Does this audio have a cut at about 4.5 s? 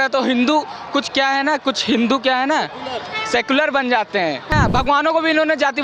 yes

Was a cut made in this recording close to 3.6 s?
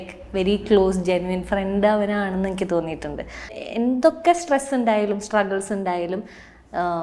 yes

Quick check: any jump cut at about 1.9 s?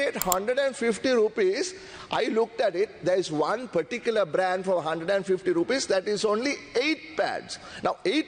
no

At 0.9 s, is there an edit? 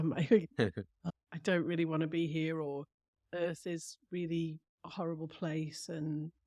yes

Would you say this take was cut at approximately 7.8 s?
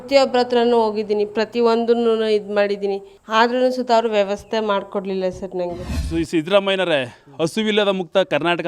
no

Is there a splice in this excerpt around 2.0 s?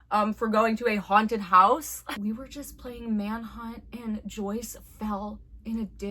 yes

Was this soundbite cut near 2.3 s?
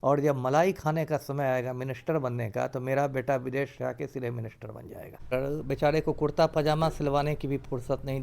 no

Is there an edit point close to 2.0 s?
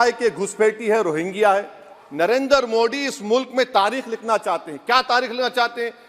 yes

